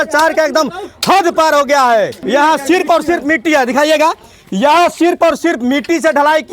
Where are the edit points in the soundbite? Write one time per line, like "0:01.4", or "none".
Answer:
0:02.2